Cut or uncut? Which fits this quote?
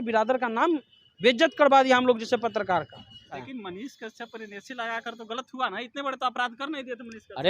cut